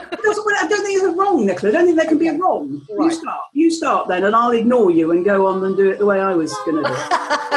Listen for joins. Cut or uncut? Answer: uncut